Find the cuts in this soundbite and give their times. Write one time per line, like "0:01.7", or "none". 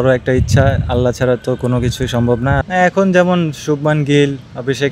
0:02.6